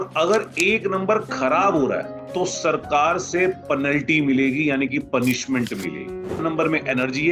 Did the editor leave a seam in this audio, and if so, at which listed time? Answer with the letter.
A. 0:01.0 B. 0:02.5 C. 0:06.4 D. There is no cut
C